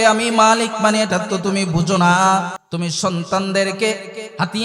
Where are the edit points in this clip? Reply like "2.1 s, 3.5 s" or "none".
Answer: 2.6 s